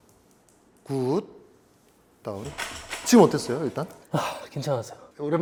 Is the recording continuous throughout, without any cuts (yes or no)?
yes